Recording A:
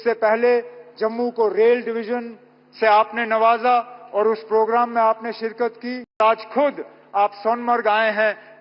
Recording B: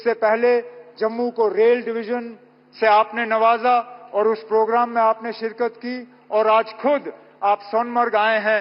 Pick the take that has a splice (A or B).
A